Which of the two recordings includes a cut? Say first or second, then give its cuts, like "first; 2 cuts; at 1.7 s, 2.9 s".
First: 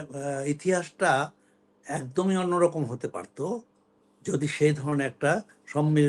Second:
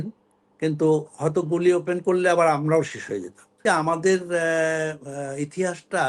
second; 1 cut; at 3.6 s